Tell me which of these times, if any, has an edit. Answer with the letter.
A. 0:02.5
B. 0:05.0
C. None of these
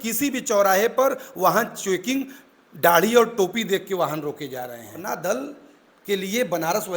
B